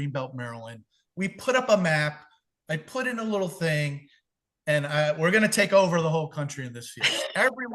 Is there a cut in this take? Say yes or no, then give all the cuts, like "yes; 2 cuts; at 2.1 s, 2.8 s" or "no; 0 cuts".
no; 0 cuts